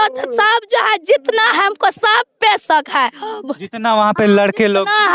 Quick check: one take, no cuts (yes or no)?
yes